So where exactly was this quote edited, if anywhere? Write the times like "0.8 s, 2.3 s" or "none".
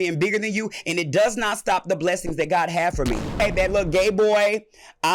3.4 s